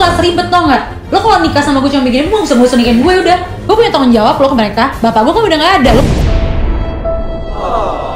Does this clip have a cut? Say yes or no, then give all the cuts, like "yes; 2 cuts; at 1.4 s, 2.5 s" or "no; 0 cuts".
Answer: yes; 1 cut; at 3.5 s